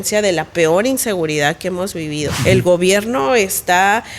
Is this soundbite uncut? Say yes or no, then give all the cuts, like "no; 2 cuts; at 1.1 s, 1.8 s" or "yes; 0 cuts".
no; 1 cut; at 2.3 s